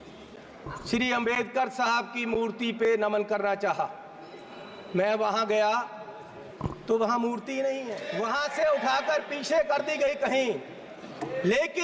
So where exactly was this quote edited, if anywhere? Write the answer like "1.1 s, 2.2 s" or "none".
8.0 s